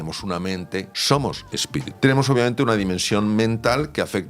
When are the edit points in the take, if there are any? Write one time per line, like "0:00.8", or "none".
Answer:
0:00.9
0:01.9